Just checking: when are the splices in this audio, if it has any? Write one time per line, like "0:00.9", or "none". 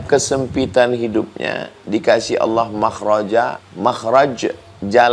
0:03.6